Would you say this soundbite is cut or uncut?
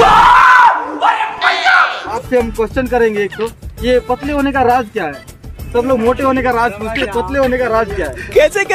cut